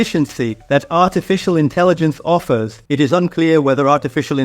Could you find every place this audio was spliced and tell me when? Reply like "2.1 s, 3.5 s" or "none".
2.8 s

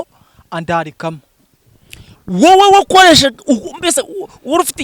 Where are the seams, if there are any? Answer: none

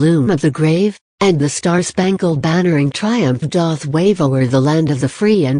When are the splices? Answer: 1.0 s, 3.9 s

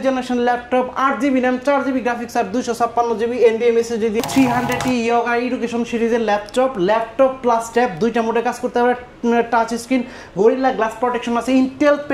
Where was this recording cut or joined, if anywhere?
4.2 s

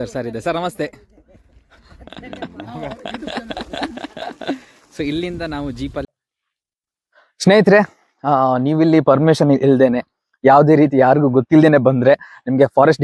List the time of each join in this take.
6.0 s

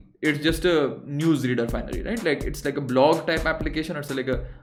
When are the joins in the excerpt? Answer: none

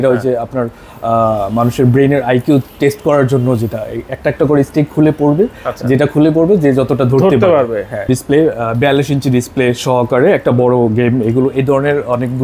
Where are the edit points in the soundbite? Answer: 8.1 s

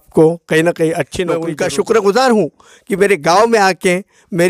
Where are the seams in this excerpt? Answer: 1.4 s

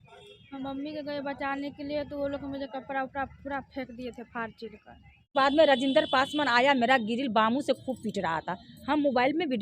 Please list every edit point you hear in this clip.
5.3 s

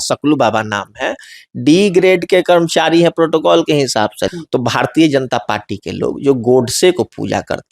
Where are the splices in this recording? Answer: 4.2 s

